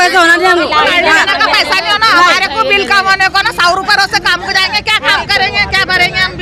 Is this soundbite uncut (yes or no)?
yes